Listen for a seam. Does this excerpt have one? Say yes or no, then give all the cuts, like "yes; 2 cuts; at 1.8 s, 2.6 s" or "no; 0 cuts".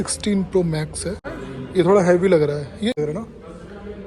yes; 2 cuts; at 1.2 s, 3.0 s